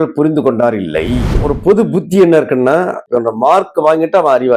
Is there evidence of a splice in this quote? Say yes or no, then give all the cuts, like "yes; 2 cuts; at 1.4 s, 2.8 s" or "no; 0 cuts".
yes; 2 cuts; at 1.3 s, 3.0 s